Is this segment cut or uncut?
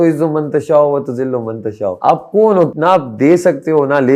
cut